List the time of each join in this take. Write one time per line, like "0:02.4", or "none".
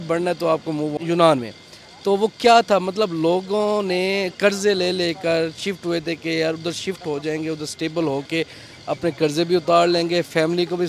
0:01.0